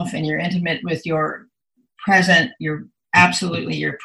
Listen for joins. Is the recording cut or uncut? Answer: uncut